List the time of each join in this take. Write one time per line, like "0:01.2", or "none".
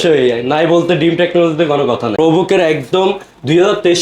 0:02.1